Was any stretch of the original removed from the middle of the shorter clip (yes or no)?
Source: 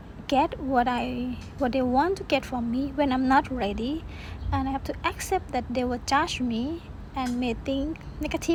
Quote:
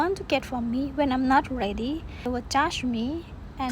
yes